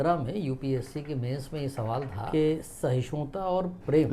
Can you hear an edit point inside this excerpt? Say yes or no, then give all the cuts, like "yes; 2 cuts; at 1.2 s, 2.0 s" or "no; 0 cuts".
yes; 1 cut; at 2.3 s